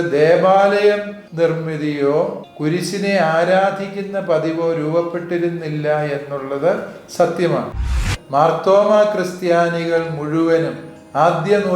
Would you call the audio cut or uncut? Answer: cut